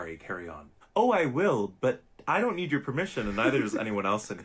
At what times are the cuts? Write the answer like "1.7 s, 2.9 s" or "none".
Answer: 3.4 s